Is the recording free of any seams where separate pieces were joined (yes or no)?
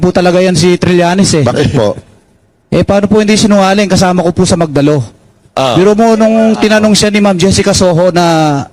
yes